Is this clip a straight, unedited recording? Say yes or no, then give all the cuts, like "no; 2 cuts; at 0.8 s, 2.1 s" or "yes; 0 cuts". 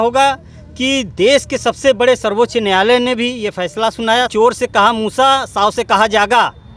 no; 1 cut; at 4.3 s